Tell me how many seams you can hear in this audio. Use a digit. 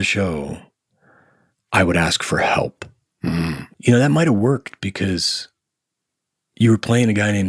1